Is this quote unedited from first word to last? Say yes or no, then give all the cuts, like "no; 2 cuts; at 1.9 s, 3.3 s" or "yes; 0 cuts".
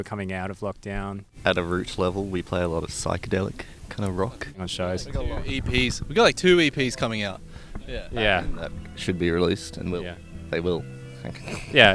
no; 2 cuts; at 1.2 s, 4.7 s